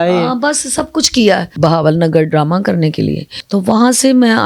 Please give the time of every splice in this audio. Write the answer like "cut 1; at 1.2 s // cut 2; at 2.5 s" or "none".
cut 1; at 1.5 s // cut 2; at 3.3 s